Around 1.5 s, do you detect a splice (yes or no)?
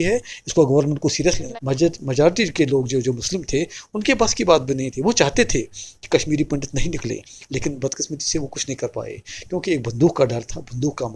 yes